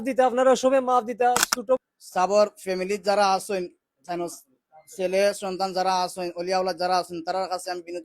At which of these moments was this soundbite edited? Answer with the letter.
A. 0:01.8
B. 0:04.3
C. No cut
A